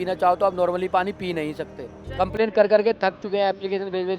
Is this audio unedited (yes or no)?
no